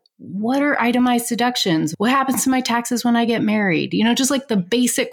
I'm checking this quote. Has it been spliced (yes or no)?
yes